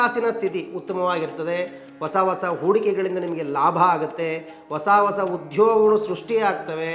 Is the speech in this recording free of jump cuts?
yes; 0 cuts

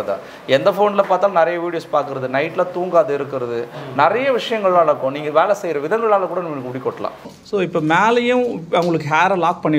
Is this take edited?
yes; 1 cut; at 7.3 s

